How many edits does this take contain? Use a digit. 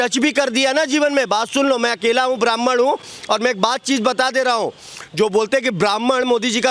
0